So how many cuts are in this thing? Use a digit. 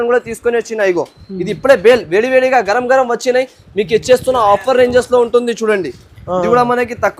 0